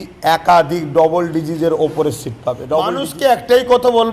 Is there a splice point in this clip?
yes; 1 cut; at 3.0 s

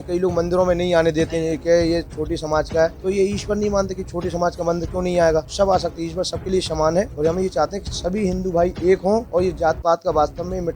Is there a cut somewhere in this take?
yes; 4 cuts; at 3.0 s, 5.5 s, 7.1 s, 9.3 s

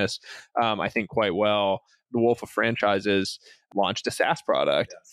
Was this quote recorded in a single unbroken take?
no; 2 cuts; at 2.0 s, 3.6 s

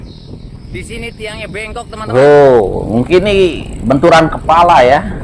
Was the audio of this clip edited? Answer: yes; 1 cut; at 2.1 s

